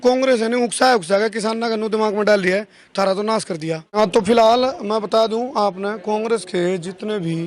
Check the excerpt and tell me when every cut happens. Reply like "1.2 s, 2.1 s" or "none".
4.0 s